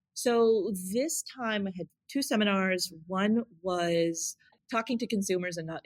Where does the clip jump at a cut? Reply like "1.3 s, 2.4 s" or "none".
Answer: 4.6 s